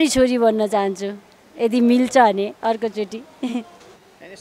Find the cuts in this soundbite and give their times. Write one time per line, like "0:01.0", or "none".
none